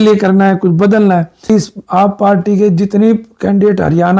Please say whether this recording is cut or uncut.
cut